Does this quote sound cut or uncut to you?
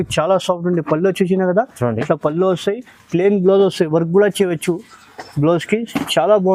uncut